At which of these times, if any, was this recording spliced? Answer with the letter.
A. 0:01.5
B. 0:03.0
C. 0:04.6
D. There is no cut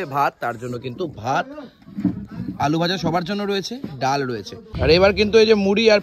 C